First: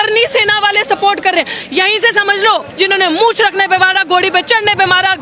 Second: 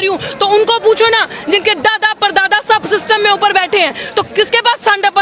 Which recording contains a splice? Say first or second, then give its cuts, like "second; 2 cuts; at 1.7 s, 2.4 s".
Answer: first; 1 cut; at 2.7 s